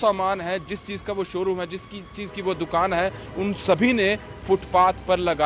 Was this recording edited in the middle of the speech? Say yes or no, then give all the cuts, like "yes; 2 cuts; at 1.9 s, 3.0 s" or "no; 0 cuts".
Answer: no; 0 cuts